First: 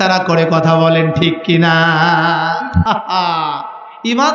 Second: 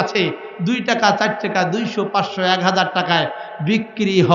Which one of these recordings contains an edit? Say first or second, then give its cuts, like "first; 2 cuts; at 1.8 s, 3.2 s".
first; 1 cut; at 2.8 s